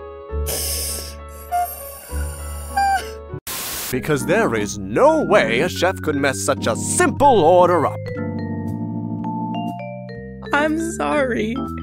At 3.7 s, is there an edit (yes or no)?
yes